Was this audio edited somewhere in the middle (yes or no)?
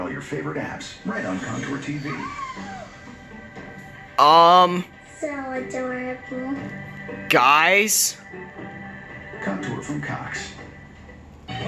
no